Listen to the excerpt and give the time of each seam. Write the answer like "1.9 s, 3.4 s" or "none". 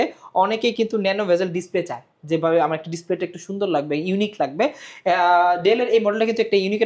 none